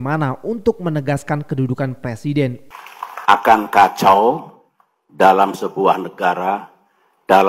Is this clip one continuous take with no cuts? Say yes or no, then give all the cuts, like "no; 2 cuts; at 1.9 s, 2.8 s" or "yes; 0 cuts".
no; 1 cut; at 2.6 s